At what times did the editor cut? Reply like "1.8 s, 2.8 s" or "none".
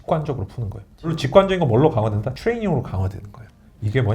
1.2 s, 2.3 s